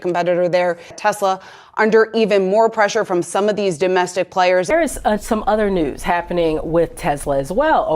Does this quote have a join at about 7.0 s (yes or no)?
no